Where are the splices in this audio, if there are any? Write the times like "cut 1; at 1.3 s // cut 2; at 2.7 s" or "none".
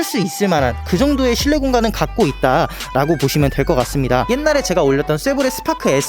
cut 1; at 4.3 s